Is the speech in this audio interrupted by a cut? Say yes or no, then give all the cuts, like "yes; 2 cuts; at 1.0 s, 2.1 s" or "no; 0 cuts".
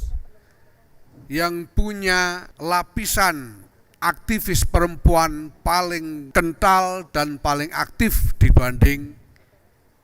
yes; 2 cuts; at 2.5 s, 6.2 s